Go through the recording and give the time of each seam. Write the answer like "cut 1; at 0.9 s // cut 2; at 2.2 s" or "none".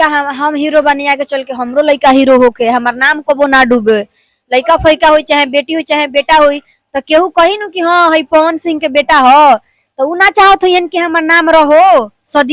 none